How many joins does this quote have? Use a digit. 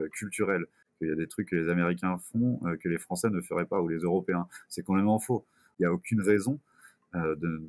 1